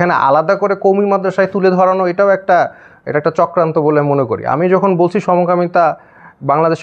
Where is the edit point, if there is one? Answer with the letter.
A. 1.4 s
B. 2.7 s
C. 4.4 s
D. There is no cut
D